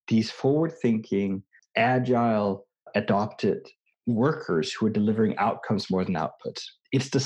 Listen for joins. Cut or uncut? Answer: cut